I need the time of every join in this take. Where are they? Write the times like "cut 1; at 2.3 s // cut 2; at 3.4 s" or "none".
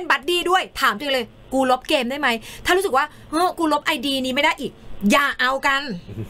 none